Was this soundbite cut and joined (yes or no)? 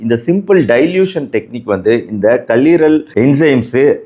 no